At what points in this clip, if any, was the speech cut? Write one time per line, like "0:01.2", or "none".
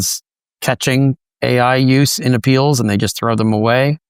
none